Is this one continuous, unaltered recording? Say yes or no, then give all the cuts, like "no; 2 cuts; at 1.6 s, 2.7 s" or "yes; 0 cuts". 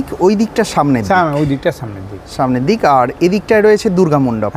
yes; 0 cuts